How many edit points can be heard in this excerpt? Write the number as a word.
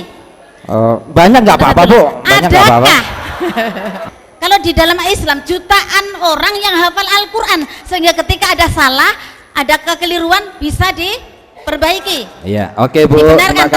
one